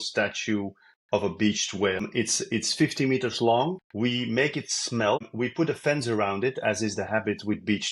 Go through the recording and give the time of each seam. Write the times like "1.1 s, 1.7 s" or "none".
2.1 s, 3.8 s, 5.3 s

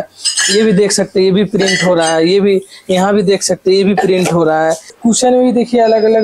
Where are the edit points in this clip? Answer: 4.9 s

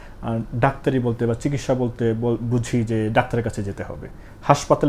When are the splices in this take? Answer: none

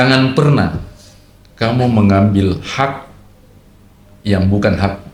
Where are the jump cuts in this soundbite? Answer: none

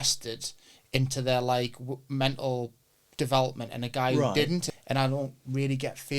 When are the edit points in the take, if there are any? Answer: 4.7 s

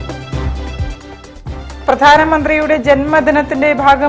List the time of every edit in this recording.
1.5 s

